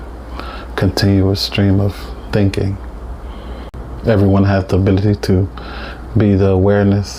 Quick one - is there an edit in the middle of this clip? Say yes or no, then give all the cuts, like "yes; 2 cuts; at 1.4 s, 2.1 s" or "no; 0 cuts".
yes; 1 cut; at 3.7 s